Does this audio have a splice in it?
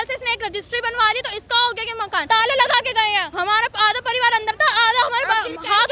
yes; 2 cuts; at 2.2 s, 3.3 s

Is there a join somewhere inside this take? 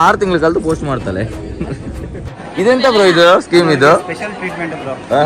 yes; 1 cut; at 2.3 s

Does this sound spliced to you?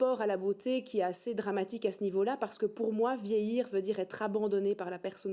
no; 0 cuts

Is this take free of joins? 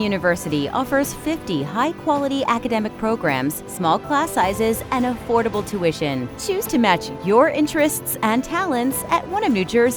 yes; 0 cuts

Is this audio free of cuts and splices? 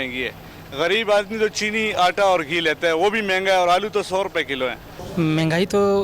no; 1 cut; at 5.0 s

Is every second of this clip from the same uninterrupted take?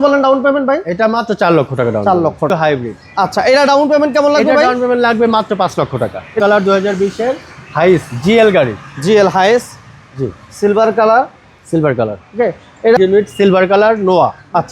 no; 3 cuts; at 2.5 s, 6.4 s, 13.0 s

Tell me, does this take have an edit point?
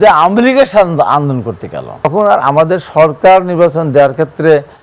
yes; 1 cut; at 2.1 s

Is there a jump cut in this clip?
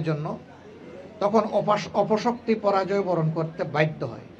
no; 0 cuts

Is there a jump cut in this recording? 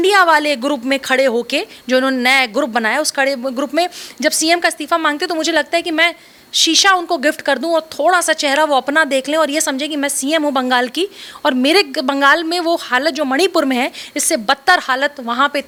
no; 0 cuts

